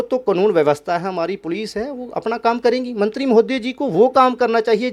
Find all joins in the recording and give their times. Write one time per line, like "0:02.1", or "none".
none